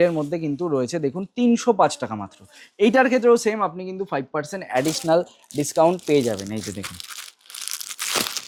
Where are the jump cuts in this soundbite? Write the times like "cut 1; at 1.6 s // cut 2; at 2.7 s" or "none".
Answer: none